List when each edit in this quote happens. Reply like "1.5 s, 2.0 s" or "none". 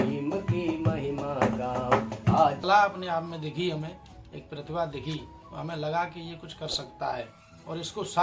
2.6 s